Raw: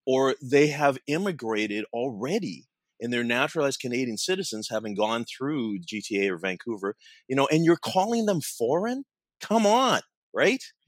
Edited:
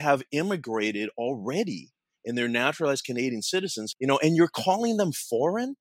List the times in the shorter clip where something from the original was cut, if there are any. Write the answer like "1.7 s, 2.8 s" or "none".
3.8 s